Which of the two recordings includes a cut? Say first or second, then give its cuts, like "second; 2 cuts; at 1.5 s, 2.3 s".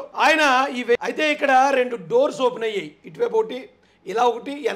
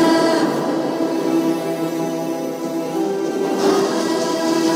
first; 1 cut; at 1.0 s